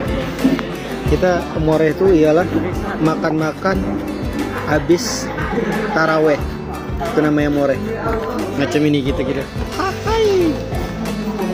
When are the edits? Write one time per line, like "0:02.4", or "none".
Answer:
none